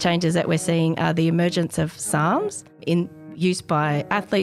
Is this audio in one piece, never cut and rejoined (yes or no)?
no